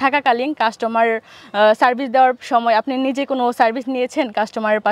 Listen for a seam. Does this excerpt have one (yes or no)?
no